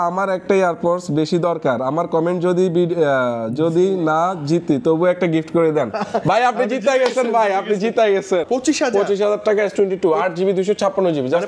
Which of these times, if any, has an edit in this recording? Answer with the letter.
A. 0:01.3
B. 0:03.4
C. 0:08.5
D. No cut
C